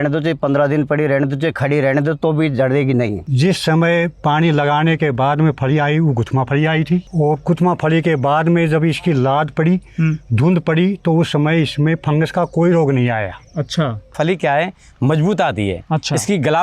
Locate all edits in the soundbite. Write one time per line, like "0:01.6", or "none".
0:03.3
0:07.1
0:14.1